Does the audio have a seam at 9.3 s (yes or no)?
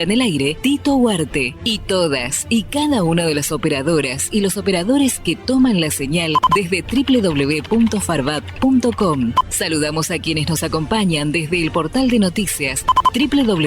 yes